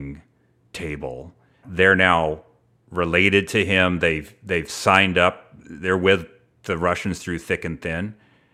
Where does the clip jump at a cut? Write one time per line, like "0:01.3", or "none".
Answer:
0:01.6